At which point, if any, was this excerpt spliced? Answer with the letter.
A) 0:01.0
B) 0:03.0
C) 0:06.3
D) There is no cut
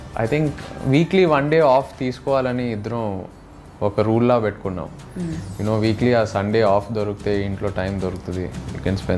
D